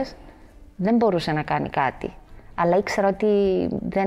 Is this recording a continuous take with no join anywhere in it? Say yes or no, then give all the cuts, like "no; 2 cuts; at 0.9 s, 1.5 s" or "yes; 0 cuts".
yes; 0 cuts